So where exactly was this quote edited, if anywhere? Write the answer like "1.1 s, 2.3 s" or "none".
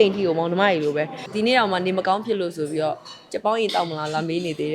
1.2 s